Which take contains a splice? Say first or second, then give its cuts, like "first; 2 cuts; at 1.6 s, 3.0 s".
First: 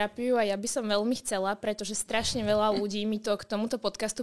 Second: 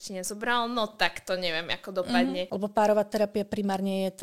second; 1 cut; at 2.5 s